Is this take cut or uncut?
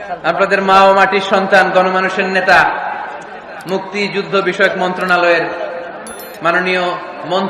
uncut